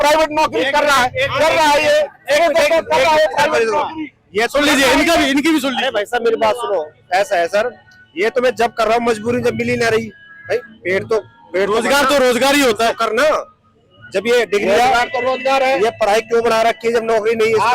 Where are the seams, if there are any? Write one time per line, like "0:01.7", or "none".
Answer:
none